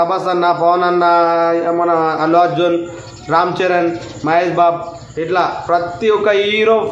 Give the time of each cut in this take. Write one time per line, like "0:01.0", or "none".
none